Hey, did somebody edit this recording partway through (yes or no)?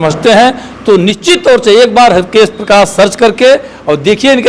no